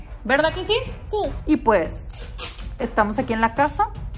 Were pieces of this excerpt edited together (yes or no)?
yes